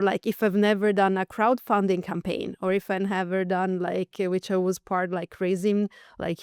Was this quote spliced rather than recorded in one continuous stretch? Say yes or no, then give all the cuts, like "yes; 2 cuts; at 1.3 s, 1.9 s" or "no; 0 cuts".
no; 0 cuts